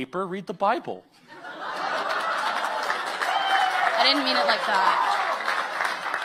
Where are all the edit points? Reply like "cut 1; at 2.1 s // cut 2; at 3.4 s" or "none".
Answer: none